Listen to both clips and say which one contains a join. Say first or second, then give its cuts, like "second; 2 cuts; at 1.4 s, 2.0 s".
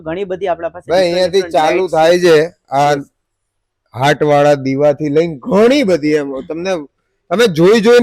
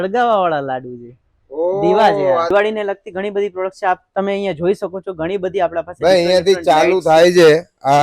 second; 1 cut; at 2.5 s